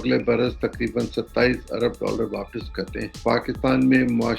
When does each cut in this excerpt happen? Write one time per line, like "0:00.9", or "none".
0:03.1

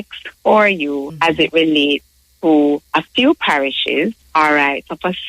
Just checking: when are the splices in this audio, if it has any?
0:01.1
0:02.8
0:04.2

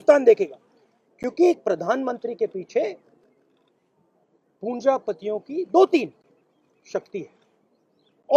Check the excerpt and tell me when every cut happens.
none

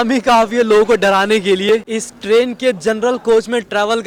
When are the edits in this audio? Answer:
none

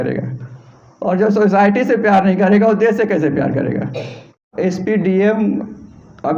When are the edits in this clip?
0:04.5

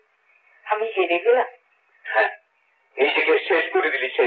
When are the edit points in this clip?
none

